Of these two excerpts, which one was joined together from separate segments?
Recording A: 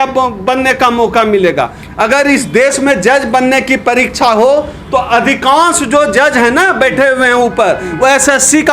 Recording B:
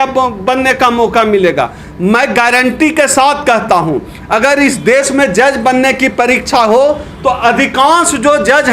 A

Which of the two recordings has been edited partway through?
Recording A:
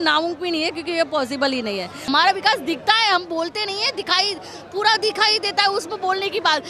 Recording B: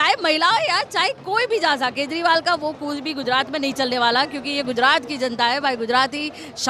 A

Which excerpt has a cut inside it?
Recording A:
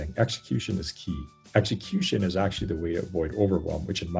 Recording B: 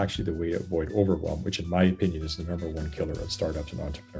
A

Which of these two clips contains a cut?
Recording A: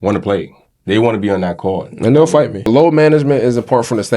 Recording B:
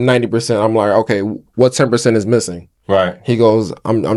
A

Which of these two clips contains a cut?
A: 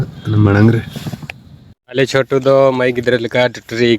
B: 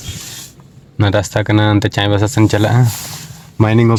A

